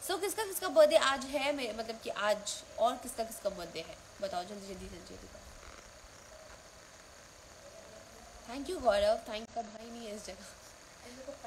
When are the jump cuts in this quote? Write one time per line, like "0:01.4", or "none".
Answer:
0:09.5

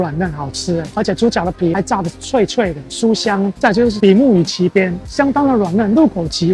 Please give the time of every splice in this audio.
none

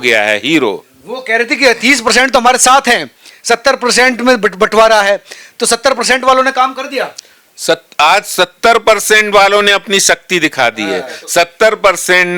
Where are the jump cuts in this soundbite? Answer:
none

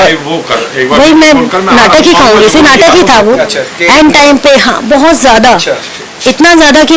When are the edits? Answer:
none

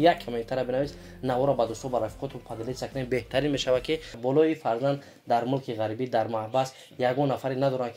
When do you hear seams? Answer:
0:04.1

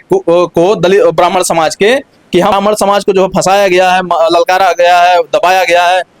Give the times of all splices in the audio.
0:02.5

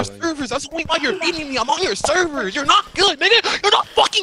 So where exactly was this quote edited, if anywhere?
none

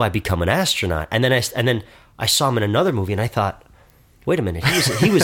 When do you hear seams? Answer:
none

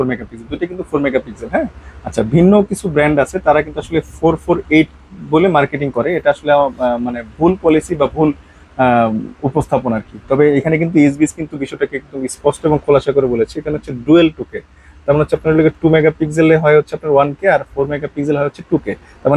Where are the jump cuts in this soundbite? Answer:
none

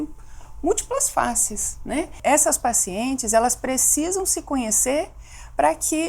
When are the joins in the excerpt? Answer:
0:02.2

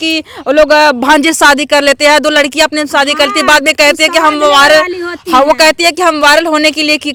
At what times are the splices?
none

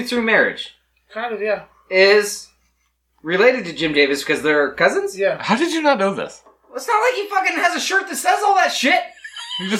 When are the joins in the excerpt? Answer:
none

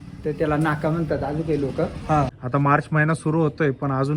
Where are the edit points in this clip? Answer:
0:02.4

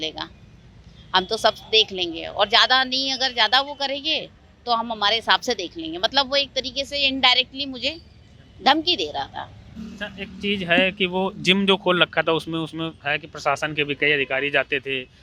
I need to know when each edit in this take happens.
none

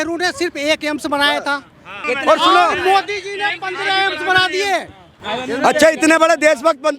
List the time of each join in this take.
0:01.9
0:05.1

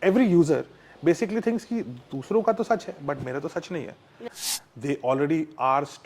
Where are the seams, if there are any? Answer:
0:04.3

